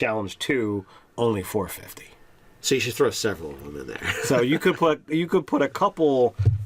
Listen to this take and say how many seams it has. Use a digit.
1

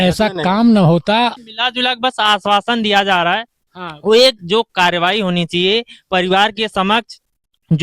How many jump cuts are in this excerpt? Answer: 1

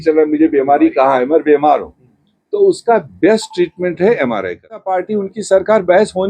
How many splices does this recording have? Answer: 1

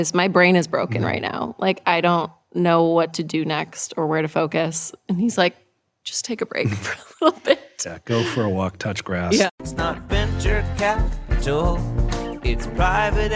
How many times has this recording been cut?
1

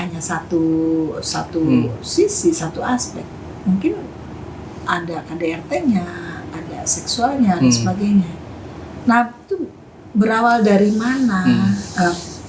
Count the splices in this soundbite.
0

